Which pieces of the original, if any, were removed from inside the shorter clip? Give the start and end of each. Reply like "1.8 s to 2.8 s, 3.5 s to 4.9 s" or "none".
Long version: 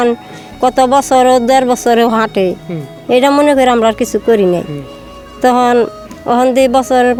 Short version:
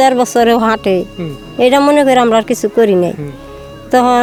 none